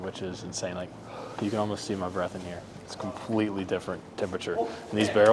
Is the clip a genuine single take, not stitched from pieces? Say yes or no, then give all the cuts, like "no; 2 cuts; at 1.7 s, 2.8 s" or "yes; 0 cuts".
yes; 0 cuts